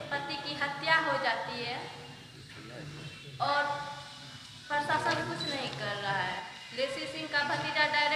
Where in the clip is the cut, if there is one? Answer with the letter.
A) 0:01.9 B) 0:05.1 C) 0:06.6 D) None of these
C